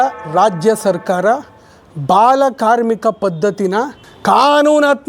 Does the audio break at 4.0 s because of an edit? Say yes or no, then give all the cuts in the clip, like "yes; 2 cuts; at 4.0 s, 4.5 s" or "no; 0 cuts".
yes; 1 cut; at 4.0 s